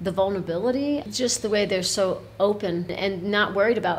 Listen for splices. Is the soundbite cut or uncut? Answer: cut